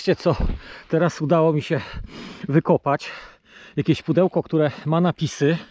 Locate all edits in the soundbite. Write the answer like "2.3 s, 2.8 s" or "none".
none